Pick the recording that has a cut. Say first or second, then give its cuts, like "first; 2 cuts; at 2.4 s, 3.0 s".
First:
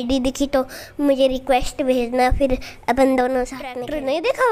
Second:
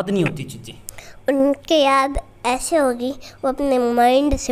first; 1 cut; at 3.6 s